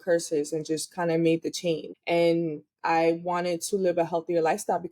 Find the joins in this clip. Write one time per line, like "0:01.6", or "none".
0:01.9